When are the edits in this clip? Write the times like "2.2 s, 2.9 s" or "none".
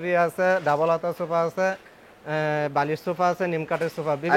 none